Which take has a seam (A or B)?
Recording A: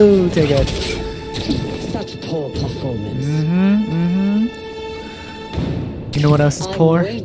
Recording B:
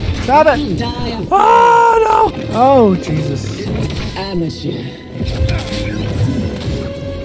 B